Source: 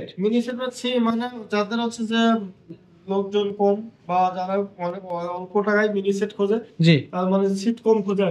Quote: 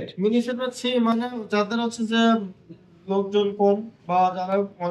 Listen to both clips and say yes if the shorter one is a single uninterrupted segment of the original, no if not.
yes